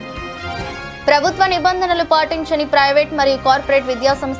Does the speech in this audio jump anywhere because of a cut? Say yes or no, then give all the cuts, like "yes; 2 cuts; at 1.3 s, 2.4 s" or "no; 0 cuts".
yes; 1 cut; at 1.0 s